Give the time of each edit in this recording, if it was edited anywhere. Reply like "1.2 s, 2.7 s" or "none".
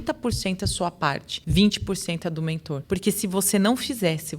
1.3 s, 2.7 s